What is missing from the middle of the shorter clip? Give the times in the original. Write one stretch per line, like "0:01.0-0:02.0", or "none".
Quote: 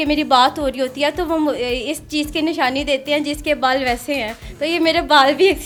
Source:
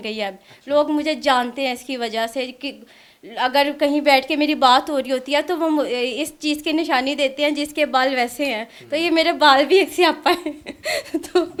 none